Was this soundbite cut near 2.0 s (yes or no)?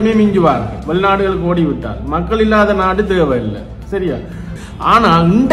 no